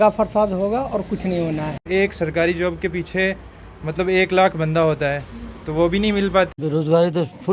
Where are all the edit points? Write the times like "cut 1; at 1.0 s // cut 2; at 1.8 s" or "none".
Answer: cut 1; at 1.8 s // cut 2; at 6.5 s